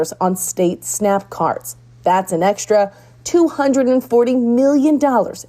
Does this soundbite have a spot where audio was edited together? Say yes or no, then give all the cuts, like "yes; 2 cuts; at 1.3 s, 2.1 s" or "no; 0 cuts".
no; 0 cuts